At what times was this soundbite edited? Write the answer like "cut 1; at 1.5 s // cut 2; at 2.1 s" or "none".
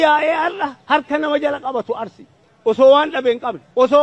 none